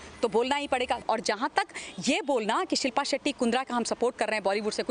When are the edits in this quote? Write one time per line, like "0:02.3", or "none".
0:01.0